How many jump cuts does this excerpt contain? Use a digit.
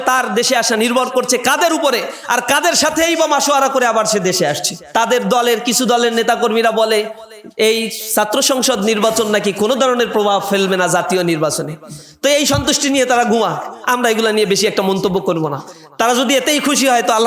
1